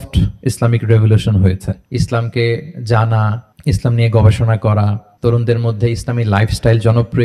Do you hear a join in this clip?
yes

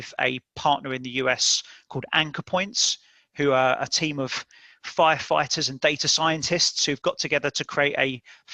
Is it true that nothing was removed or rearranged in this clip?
yes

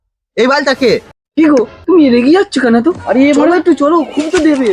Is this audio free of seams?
no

